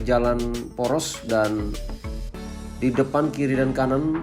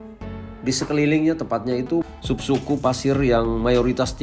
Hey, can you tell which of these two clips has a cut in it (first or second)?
second